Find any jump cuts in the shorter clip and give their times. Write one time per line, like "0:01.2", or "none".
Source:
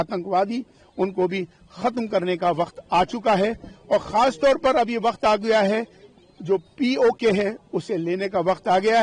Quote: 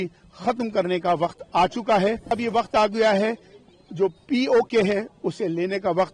0:02.4